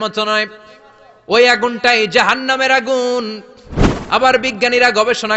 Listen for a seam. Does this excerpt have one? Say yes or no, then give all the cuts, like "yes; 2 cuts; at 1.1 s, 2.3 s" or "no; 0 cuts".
no; 0 cuts